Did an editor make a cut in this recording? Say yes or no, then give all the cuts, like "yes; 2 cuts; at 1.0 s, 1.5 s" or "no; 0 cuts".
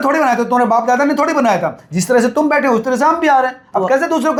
no; 0 cuts